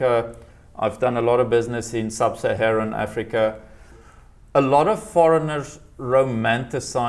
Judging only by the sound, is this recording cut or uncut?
cut